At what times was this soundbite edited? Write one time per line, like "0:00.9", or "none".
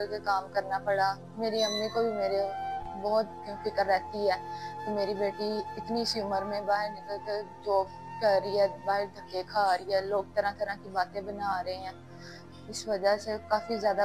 none